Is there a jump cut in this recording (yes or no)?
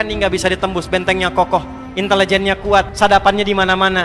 yes